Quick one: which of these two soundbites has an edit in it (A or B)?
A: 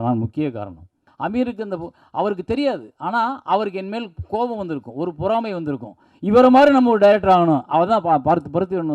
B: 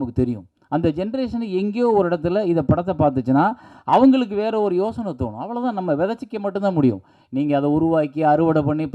A